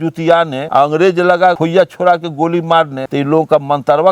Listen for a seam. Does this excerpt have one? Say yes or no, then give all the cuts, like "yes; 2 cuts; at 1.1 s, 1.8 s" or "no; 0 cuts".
no; 0 cuts